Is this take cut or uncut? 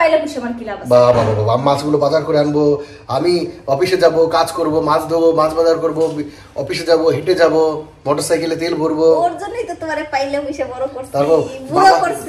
uncut